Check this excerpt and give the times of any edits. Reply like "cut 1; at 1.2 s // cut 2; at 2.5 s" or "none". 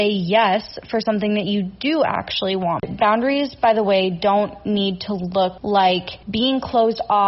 cut 1; at 2.8 s // cut 2; at 5.6 s // cut 3; at 6.2 s